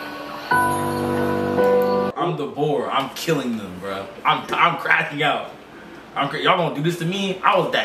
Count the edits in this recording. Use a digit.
1